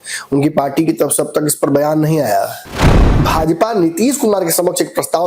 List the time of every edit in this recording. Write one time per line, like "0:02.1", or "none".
0:02.9

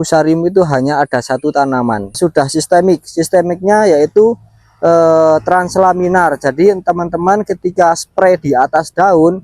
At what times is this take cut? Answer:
0:02.2

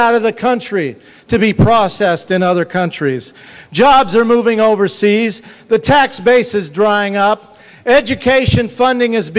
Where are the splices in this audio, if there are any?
0:01.7

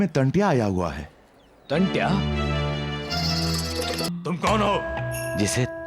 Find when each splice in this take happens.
0:04.1

